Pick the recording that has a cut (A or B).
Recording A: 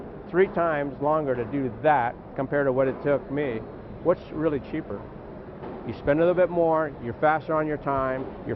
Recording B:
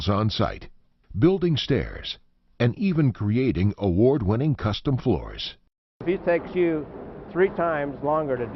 B